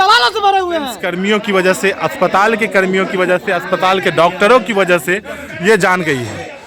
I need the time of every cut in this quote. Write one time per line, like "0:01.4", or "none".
0:01.0